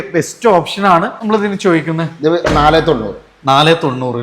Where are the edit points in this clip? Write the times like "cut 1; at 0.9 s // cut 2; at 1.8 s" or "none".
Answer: cut 1; at 1.2 s